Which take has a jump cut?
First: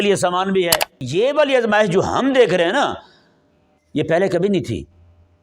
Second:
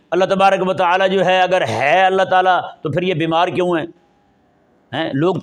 first; 1 cut; at 1.0 s

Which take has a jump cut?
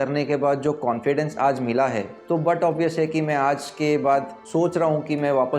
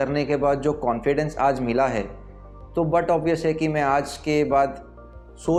first; 2 cuts; at 2.1 s, 4.4 s

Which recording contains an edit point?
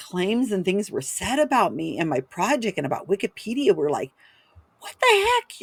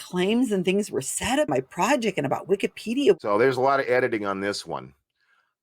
second; 2 cuts; at 1.5 s, 3.2 s

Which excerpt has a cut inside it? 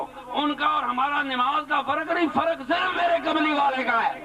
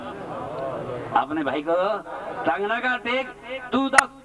second; 1 cut; at 2.1 s

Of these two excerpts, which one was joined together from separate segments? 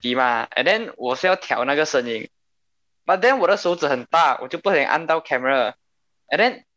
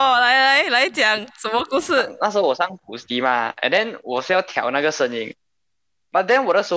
second; 1 cut; at 2.1 s

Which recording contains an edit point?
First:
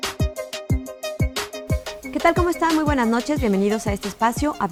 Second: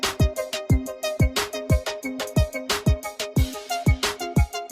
second; 1 cut; at 2.0 s

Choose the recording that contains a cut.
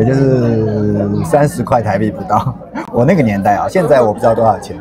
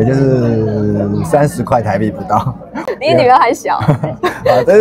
second; 1 cut; at 2.8 s

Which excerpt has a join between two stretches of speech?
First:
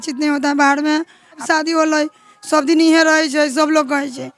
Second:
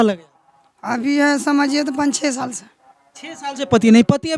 first; 1 cut; at 1.4 s

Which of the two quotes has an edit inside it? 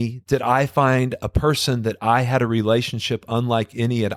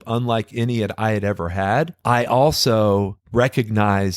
second; 2 cuts; at 2.0 s, 3.2 s

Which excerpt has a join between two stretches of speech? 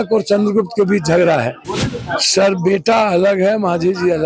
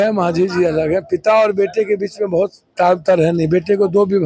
first; 1 cut; at 1.6 s

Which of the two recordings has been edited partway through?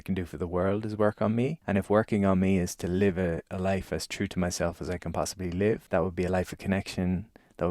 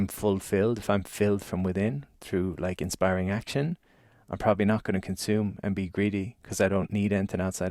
first; 2 cuts; at 1.6 s, 5.8 s

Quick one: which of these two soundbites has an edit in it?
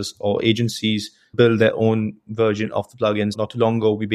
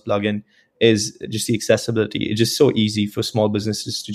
first; 2 cuts; at 1.3 s, 3.3 s

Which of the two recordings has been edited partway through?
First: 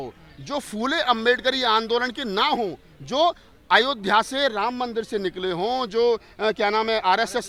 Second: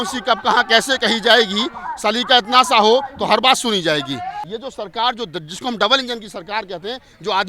second; 1 cut; at 4.4 s

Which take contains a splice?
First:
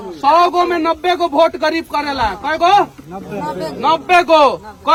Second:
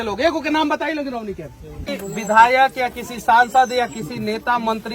second; 1 cut; at 1.7 s

